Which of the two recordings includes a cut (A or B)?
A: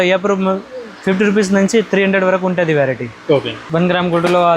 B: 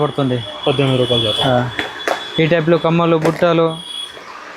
A